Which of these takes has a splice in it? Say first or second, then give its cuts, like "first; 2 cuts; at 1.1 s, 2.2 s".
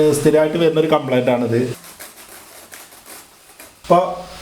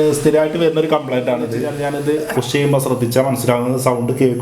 second; 1 cut; at 1.7 s